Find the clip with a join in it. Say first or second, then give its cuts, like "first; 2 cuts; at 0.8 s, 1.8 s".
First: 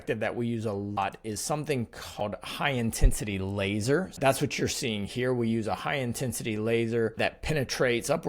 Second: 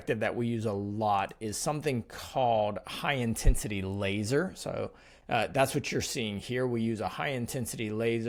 first; 4 cuts; at 1.0 s, 2.2 s, 4.2 s, 7.2 s